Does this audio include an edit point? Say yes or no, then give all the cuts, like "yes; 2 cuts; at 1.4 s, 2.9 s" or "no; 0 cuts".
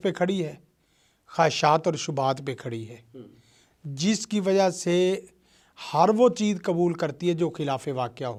no; 0 cuts